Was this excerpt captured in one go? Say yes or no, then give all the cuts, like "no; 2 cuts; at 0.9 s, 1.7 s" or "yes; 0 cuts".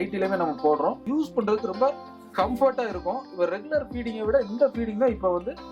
no; 1 cut; at 1.0 s